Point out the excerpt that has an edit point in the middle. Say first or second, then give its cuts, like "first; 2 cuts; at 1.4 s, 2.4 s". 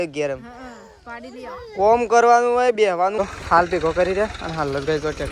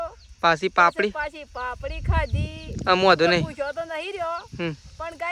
first; 1 cut; at 3.2 s